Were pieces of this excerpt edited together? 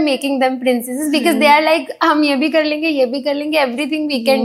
no; 0 cuts

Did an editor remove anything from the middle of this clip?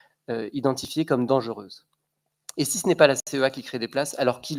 no; 0 cuts

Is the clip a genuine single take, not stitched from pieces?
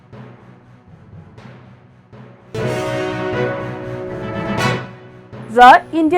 no; 2 cuts; at 2.5 s, 4.9 s

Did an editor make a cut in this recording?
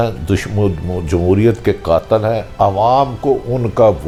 no; 0 cuts

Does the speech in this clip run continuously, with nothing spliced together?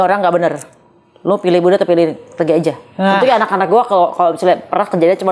yes; 0 cuts

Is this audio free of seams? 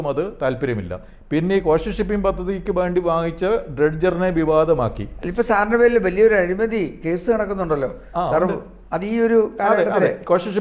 yes; 0 cuts

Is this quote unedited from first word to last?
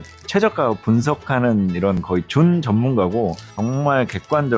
no; 1 cut; at 3.5 s

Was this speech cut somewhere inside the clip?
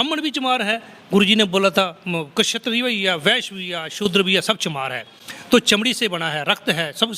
no; 0 cuts

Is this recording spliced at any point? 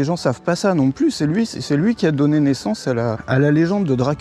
yes; 1 cut; at 3.2 s

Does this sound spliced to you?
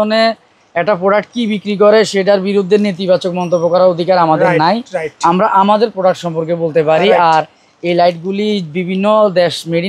no; 0 cuts

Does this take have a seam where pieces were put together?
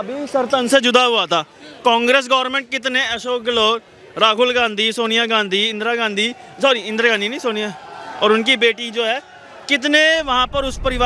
no; 0 cuts

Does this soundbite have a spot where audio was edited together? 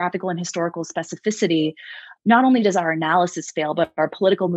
yes; 1 cut; at 2.1 s

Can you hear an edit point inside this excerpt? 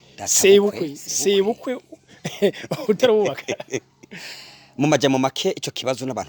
no; 0 cuts

